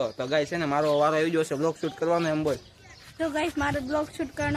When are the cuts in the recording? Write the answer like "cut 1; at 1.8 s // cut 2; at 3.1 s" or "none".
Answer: none